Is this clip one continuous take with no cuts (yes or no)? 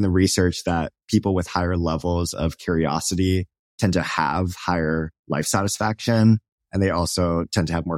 yes